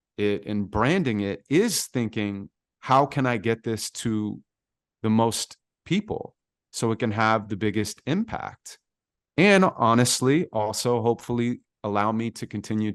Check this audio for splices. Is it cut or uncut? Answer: uncut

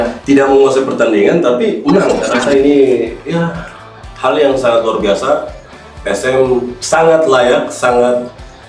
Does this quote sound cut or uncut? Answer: cut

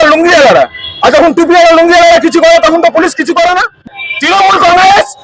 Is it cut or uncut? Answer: cut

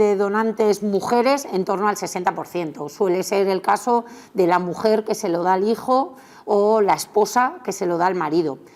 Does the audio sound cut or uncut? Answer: uncut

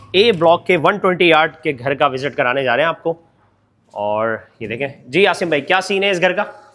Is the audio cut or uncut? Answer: uncut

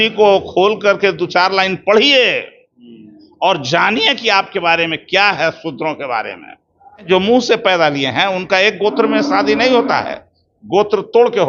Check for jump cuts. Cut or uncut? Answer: cut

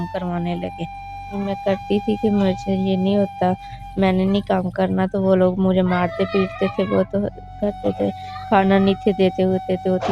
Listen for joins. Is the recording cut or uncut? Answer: cut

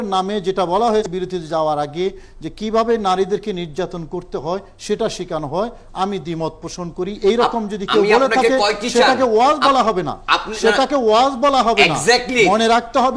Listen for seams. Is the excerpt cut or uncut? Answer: cut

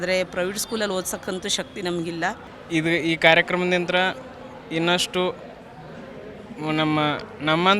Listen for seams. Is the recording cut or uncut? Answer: cut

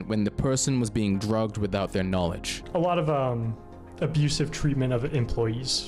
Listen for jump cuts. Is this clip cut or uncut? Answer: cut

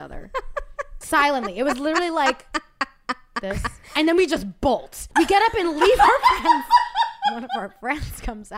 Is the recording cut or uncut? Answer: cut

